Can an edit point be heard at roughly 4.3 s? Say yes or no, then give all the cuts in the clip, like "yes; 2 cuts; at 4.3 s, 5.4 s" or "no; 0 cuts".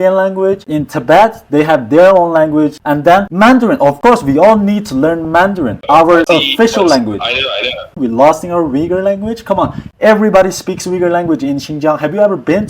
no; 1 cut; at 9.0 s